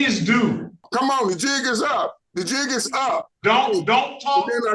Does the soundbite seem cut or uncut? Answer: cut